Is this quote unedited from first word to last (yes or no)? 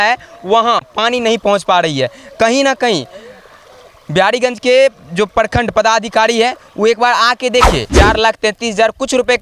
no